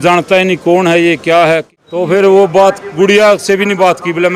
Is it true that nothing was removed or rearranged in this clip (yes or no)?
no